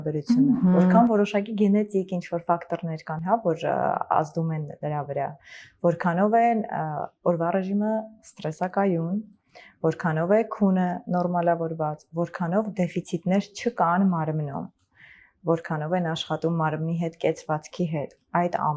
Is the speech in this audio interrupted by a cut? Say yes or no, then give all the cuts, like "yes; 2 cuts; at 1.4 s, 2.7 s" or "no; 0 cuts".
no; 0 cuts